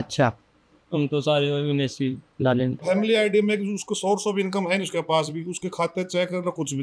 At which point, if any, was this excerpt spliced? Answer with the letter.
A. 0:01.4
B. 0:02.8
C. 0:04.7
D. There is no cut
B